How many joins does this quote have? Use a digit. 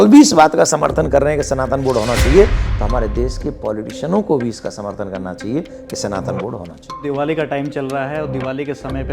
1